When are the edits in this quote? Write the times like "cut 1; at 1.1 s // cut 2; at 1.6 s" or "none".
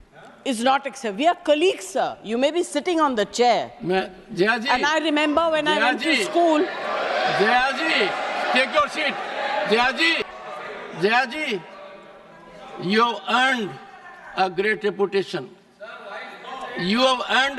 cut 1; at 10.3 s

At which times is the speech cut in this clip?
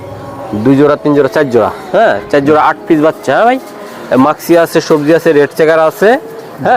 none

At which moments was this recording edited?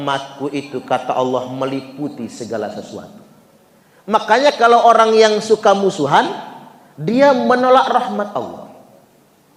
none

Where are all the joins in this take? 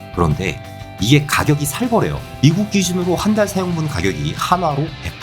cut 1; at 0.9 s // cut 2; at 2.2 s

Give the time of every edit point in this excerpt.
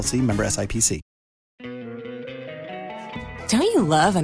cut 1; at 1.5 s

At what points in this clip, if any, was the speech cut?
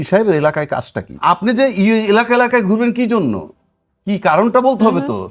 cut 1; at 1.2 s

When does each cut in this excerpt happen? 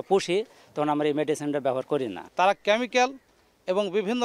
cut 1; at 2.2 s

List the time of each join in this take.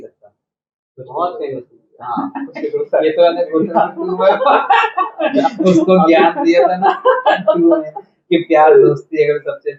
none

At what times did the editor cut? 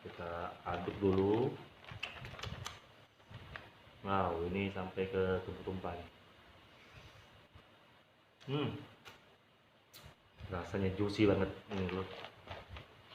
none

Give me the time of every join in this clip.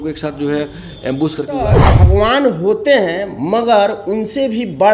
cut 1; at 1.8 s

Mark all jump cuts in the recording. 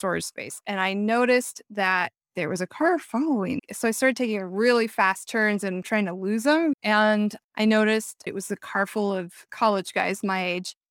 cut 1; at 5.8 s // cut 2; at 6.8 s // cut 3; at 8.2 s // cut 4; at 9.5 s

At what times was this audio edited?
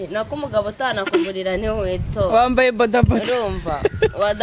none

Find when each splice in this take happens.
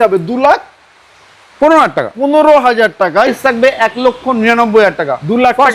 cut 1; at 3.4 s

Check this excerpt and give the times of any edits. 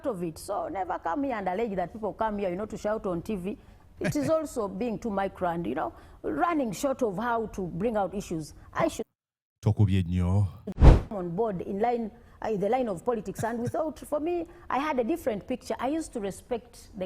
cut 1; at 11.0 s

